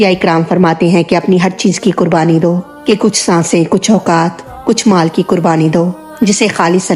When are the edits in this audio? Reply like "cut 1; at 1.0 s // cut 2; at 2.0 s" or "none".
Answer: none